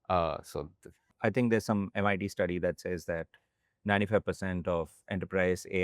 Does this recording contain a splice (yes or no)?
yes